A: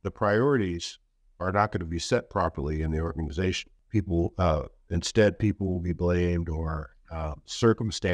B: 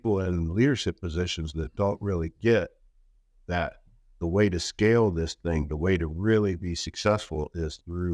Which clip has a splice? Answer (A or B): A